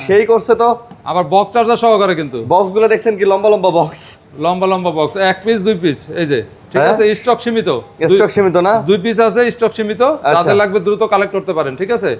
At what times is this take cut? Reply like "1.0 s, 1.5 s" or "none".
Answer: none